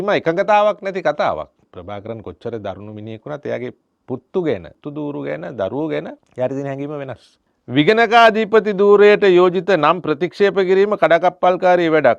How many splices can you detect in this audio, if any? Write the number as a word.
five